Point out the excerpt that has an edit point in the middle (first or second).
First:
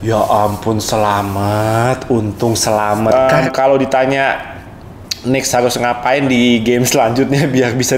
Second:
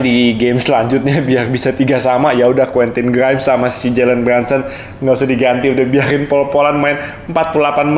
first